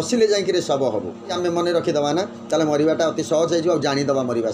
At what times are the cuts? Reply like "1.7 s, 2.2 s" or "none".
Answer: 1.3 s